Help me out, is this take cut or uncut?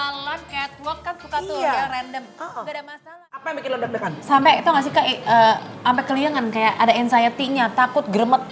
cut